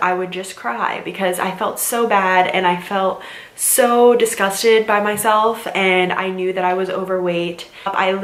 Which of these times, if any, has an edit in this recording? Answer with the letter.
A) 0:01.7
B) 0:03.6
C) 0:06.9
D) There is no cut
D